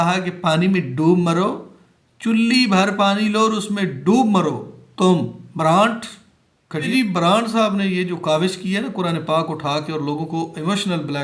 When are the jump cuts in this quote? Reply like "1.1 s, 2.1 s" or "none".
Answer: 6.9 s